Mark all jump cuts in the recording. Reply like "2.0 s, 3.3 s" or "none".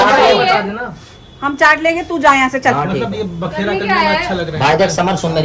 none